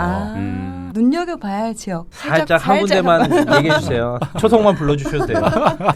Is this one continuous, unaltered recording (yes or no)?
no